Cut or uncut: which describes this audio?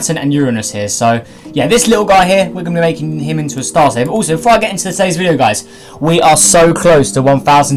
uncut